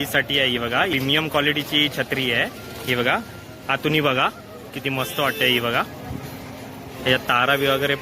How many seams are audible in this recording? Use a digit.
1